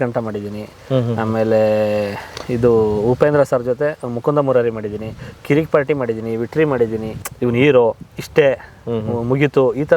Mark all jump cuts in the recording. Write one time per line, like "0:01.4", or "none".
0:07.1